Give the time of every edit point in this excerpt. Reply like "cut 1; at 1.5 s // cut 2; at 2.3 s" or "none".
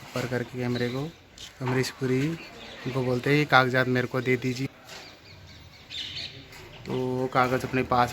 cut 1; at 4.7 s